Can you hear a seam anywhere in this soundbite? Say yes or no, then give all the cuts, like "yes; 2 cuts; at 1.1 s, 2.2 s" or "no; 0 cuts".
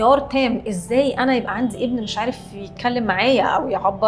no; 0 cuts